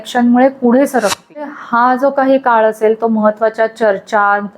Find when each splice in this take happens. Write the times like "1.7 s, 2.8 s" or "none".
1.5 s